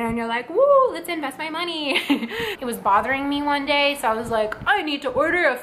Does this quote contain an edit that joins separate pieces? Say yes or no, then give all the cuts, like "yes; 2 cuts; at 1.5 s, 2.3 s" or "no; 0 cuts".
yes; 1 cut; at 2.6 s